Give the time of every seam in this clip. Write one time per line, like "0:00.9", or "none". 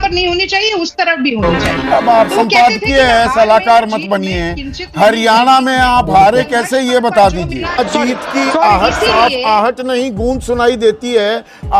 0:07.8